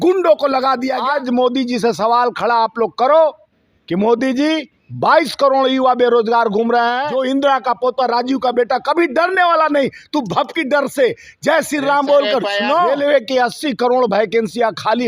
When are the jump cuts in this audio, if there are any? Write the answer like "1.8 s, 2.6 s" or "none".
1.0 s, 7.1 s, 12.9 s